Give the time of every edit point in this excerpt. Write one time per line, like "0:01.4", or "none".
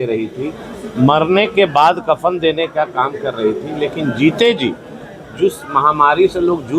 none